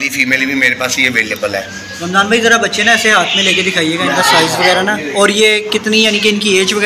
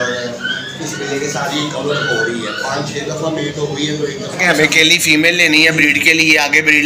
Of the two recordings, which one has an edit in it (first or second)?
second